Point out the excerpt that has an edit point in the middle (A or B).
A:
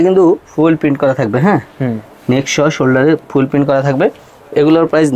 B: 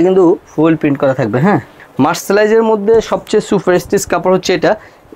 B